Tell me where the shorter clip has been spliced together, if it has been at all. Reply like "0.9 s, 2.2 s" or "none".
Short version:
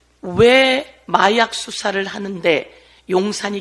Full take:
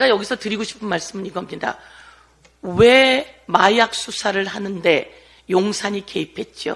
none